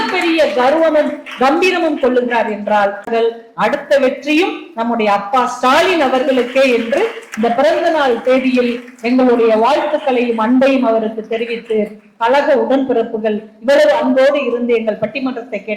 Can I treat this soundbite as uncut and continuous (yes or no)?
no